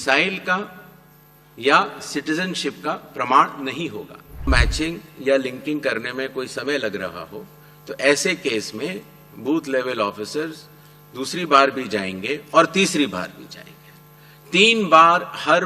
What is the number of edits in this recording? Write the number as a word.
one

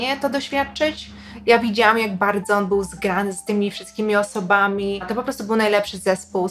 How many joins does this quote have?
two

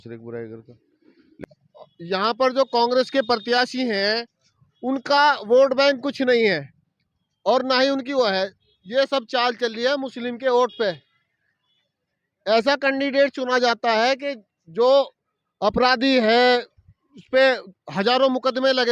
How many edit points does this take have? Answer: one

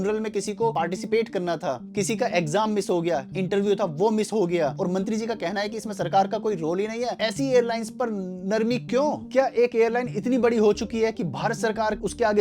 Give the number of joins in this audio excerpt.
five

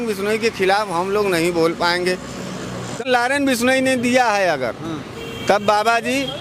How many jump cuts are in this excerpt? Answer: one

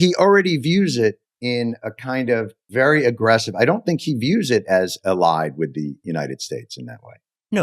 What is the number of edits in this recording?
two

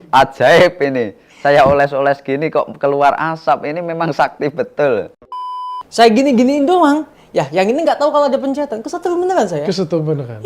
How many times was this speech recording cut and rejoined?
one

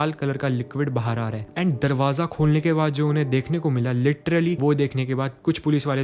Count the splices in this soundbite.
one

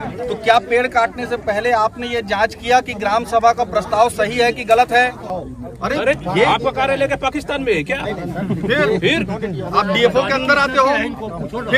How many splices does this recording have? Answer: one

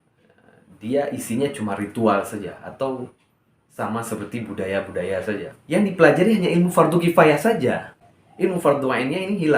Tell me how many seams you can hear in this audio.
one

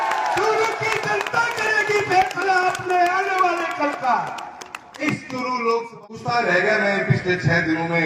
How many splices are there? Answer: one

